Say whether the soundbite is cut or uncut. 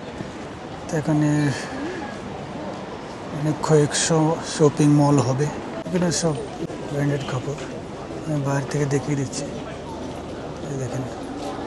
cut